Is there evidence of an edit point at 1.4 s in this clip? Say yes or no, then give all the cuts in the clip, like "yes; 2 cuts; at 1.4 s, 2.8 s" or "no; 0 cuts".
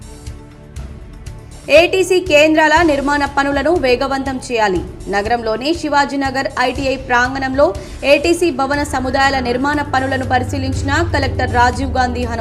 no; 0 cuts